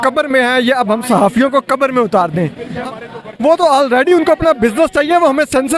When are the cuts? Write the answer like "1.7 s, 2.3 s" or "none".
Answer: 2.7 s